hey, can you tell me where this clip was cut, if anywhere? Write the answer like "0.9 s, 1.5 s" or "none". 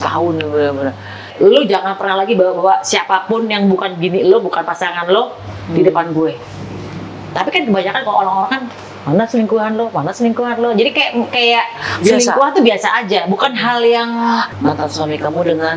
1.3 s, 14.5 s

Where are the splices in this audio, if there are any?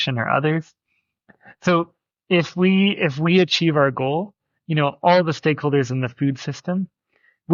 none

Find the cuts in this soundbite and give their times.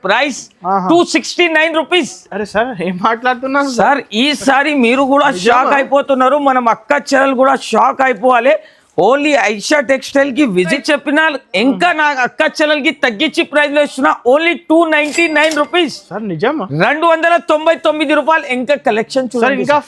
10.7 s

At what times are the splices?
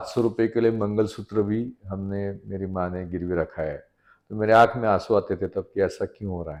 none

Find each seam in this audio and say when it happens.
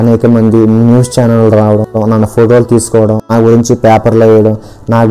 2.0 s, 3.3 s

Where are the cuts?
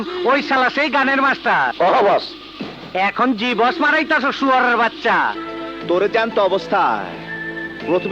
5.5 s

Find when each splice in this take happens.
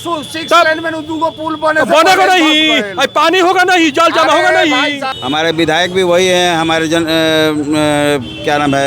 5.0 s

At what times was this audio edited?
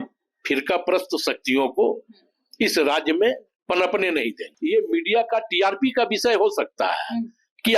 4.5 s

